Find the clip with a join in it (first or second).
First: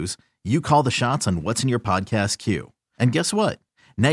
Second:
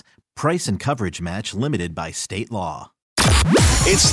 second